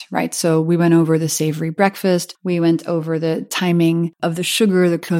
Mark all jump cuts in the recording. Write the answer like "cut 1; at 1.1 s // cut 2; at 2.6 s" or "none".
cut 1; at 2.3 s // cut 2; at 4.1 s